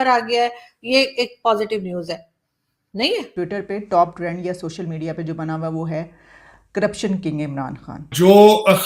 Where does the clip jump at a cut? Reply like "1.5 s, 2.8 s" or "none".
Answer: 3.3 s, 8.1 s

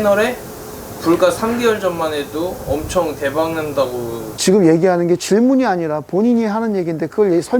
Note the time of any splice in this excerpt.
none

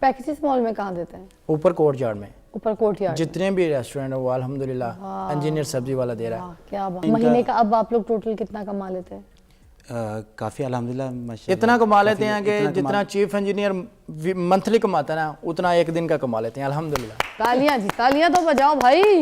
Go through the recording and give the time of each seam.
7.0 s

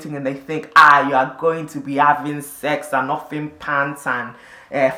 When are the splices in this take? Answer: none

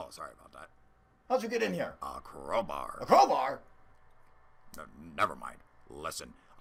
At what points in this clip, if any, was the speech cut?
none

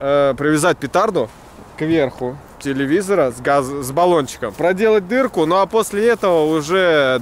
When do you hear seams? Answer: 4.5 s

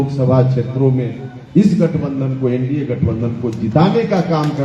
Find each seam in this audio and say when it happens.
none

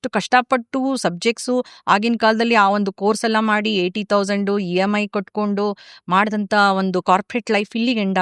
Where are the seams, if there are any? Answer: none

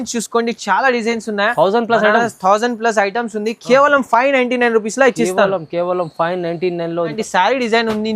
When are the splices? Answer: 7.1 s

